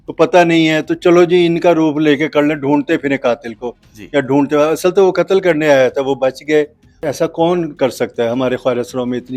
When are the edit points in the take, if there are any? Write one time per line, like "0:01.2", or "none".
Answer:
0:07.0

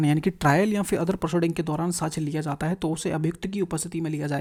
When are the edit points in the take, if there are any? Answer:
none

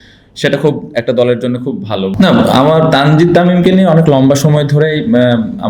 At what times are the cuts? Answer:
0:02.1

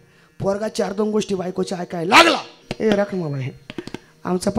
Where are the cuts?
0:02.7

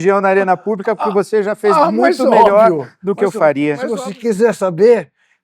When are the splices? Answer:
0:03.9

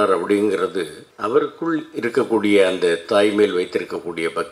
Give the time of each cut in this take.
0:01.0

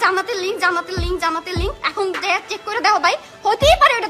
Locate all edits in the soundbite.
none

